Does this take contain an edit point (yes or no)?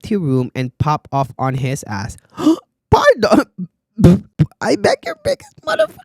yes